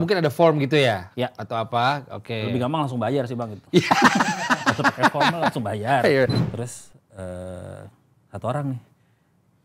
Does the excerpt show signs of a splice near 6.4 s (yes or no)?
yes